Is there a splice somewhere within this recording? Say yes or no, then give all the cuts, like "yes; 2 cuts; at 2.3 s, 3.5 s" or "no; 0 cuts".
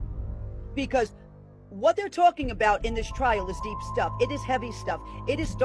no; 0 cuts